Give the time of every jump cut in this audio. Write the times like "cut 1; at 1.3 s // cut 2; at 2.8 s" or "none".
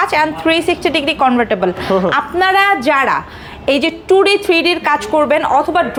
none